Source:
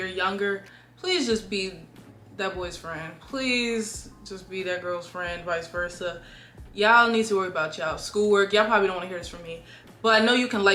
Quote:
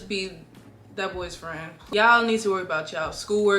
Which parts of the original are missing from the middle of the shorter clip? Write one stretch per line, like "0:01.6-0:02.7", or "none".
0:03.2-0:06.6